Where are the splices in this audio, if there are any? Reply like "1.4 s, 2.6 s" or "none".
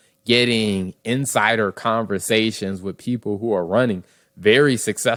none

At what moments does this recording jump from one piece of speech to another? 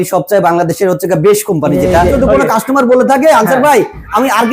2.1 s

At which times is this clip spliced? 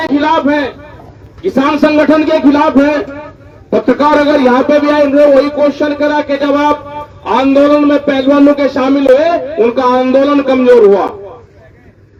none

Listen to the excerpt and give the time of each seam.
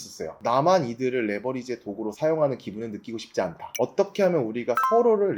3.7 s

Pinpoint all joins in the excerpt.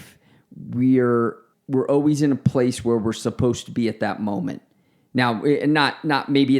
1.5 s

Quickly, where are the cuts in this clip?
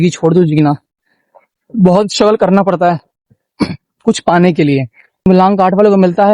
5.2 s

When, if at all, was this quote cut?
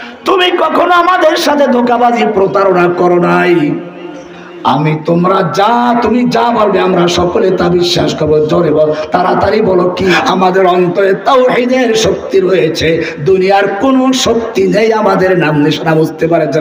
10.1 s

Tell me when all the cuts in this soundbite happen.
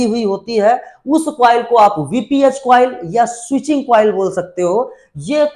none

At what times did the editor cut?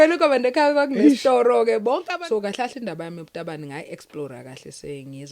2.0 s

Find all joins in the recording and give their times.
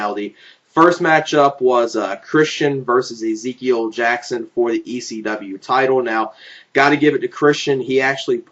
4.1 s

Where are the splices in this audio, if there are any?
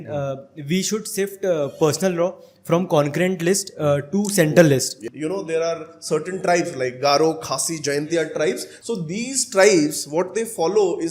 5.0 s, 8.7 s

